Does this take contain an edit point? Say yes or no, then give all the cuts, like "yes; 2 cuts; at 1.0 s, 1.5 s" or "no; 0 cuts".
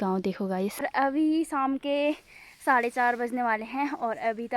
yes; 1 cut; at 0.9 s